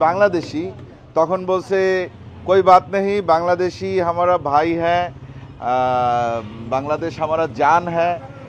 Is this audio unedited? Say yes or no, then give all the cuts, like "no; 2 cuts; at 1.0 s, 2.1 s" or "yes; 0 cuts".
yes; 0 cuts